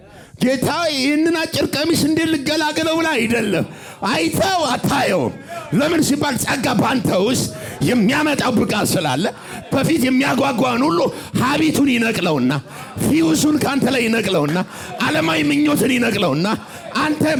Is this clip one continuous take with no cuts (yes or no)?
yes